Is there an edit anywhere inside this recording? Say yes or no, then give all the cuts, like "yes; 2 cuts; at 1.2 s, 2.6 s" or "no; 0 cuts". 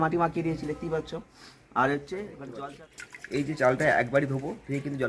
yes; 1 cut; at 2.5 s